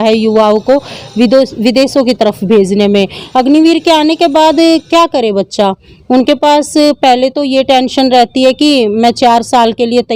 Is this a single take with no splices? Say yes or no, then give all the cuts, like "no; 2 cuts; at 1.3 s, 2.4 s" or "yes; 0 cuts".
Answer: no; 1 cut; at 3.2 s